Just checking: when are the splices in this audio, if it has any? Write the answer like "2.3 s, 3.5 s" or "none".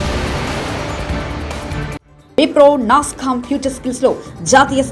2.1 s